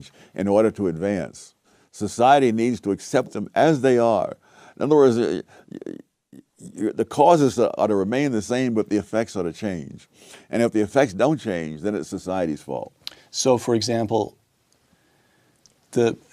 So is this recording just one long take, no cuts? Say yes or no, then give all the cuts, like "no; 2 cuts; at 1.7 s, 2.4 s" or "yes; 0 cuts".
no; 1 cut; at 2.3 s